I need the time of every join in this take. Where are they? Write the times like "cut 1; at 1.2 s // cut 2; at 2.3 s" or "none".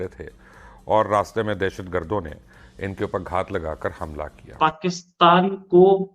cut 1; at 4.5 s